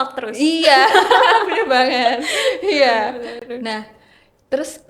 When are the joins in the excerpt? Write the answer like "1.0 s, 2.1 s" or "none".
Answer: none